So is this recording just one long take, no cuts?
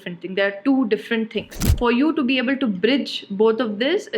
no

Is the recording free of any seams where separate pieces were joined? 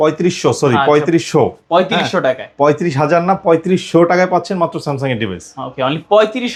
yes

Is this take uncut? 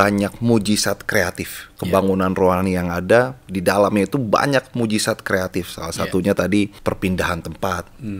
no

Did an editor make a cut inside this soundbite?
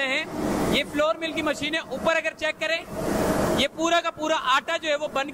no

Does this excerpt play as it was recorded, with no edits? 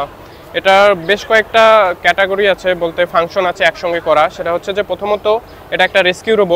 yes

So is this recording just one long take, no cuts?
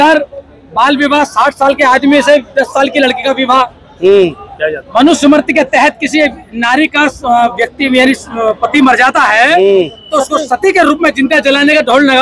yes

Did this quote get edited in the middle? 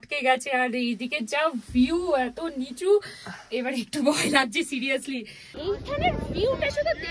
yes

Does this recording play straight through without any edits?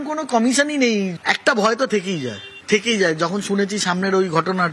no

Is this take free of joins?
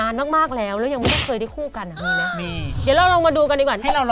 yes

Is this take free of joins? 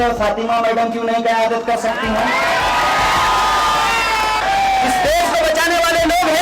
no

